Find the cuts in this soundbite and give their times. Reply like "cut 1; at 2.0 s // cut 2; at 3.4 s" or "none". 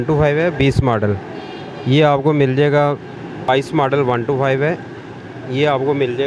cut 1; at 3.5 s